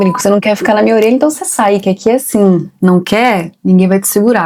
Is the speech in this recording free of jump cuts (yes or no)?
yes